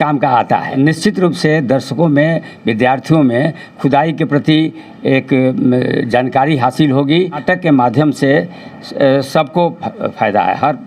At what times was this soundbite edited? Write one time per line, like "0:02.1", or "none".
0:00.8
0:07.4